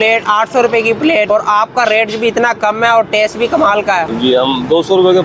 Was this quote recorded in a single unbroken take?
no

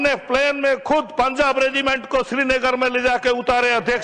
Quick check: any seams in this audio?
no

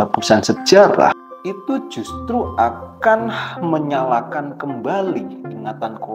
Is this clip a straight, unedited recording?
no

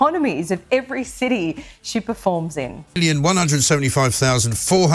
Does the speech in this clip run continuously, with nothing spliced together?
no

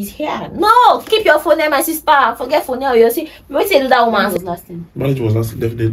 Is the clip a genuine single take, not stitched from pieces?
no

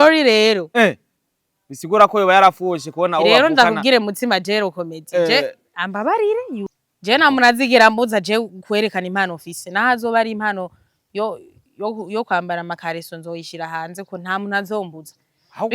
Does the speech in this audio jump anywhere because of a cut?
yes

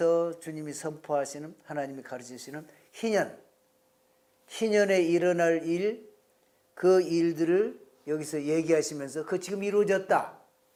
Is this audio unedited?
yes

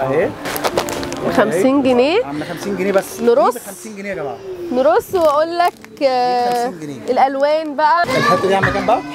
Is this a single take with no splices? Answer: no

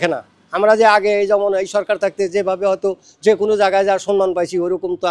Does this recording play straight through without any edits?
yes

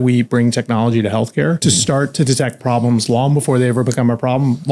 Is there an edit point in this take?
yes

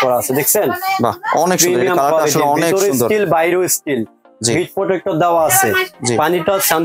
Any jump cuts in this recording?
no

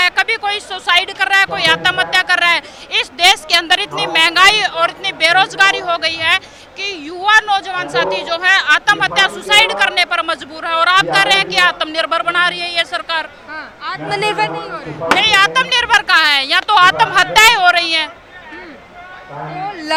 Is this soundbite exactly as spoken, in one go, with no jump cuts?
yes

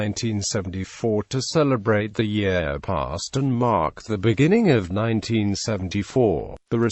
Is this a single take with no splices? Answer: yes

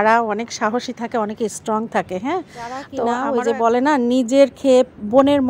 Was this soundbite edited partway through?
yes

